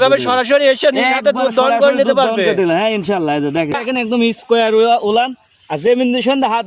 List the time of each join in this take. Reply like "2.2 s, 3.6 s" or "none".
3.8 s